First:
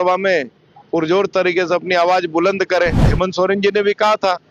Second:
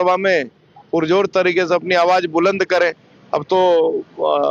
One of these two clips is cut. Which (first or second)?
first